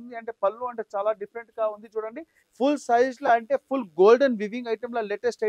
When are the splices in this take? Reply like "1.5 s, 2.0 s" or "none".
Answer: 2.4 s